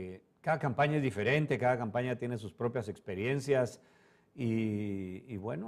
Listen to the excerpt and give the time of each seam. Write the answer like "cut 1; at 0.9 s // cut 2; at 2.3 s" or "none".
cut 1; at 4.3 s